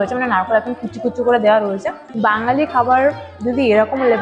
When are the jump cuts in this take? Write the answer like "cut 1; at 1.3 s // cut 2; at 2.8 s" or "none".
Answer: cut 1; at 2.0 s